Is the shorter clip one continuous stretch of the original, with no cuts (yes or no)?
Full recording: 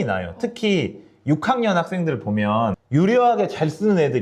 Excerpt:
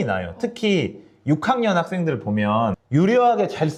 yes